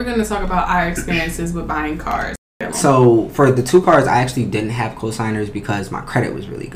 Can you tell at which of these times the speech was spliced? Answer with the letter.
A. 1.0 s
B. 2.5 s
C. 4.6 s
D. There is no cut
B